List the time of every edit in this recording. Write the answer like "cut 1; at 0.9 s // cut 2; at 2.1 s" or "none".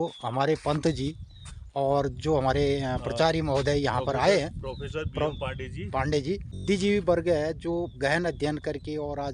cut 1; at 6.5 s